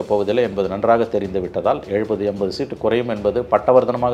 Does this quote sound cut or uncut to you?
uncut